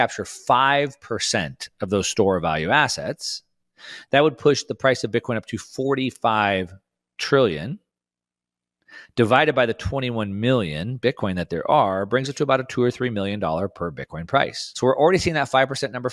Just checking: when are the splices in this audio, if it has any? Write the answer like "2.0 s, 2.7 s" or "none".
14.6 s